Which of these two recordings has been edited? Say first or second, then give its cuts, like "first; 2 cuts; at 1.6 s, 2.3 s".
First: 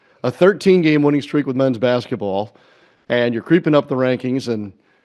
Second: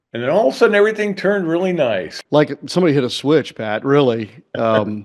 second; 1 cut; at 2.1 s